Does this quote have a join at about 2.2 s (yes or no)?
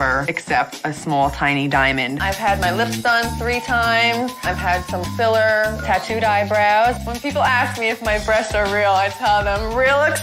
yes